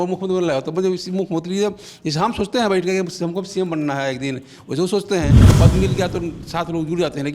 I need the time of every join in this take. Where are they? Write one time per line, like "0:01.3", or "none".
0:05.5